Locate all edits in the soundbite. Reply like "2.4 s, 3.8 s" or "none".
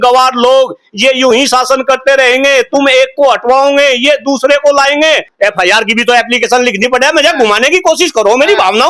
5.3 s